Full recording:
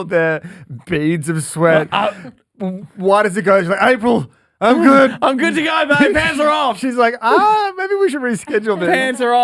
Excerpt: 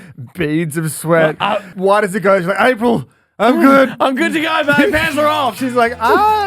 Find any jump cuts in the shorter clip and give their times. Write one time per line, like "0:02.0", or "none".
0:01.7